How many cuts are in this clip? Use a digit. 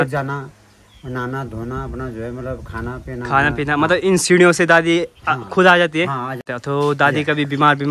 1